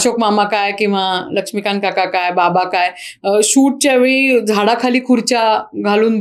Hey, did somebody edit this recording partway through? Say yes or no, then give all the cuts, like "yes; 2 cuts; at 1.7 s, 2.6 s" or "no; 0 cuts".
no; 0 cuts